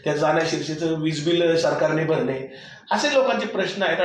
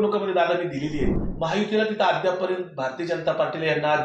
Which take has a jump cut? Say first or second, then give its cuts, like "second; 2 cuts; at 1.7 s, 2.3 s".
second; 1 cut; at 1.2 s